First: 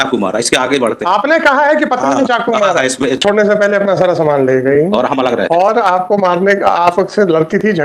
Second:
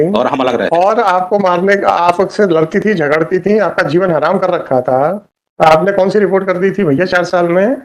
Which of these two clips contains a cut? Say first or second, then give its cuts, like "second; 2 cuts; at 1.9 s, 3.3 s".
first; 1 cut; at 3.3 s